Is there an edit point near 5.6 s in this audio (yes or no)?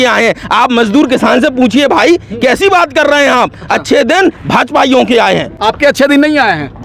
no